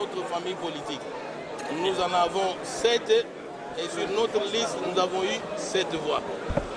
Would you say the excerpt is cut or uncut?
uncut